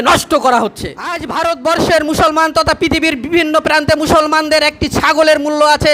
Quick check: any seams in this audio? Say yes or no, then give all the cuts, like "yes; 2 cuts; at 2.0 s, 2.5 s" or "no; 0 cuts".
yes; 1 cut; at 1.2 s